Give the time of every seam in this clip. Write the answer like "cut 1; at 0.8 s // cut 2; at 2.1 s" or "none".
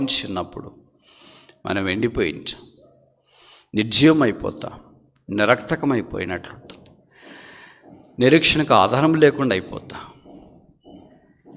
none